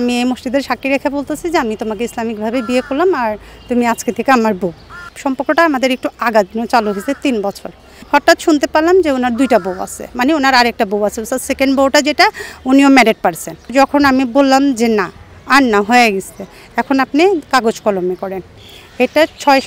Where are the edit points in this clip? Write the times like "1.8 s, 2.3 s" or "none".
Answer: 5.1 s, 8.0 s, 13.7 s